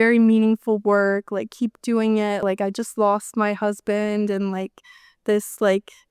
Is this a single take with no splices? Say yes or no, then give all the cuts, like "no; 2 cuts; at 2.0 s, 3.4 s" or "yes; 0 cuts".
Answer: no; 1 cut; at 2.4 s